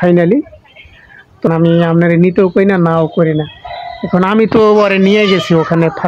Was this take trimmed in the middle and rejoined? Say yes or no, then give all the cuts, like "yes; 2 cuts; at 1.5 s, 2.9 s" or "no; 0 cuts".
yes; 1 cut; at 1.5 s